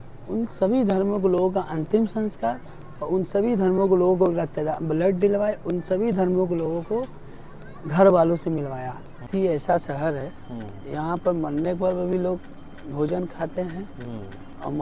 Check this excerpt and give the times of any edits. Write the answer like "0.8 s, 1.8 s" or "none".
9.2 s